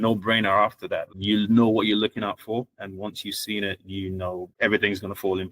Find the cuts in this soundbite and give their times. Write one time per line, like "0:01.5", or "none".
0:01.1
0:04.5